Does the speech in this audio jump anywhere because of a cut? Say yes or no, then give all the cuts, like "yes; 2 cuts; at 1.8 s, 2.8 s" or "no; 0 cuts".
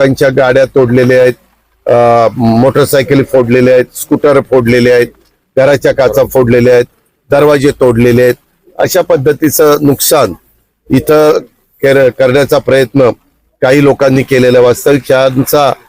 no; 0 cuts